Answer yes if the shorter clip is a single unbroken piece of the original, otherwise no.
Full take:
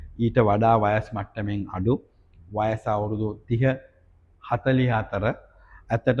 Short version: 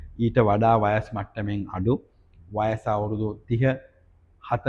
yes